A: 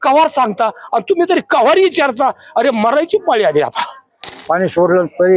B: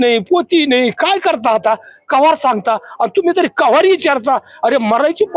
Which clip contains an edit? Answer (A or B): A